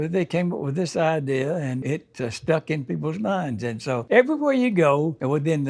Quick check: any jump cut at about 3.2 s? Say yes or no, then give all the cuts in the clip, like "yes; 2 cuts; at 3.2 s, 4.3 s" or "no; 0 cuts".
no; 1 cut; at 1.8 s